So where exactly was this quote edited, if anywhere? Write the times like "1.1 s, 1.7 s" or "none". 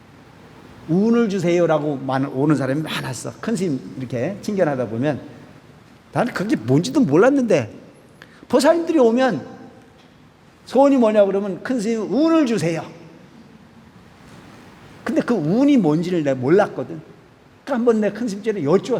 none